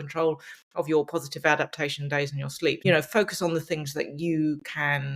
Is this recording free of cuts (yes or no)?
no